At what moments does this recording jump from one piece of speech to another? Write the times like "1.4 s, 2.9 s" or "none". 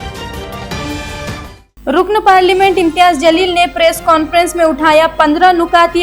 none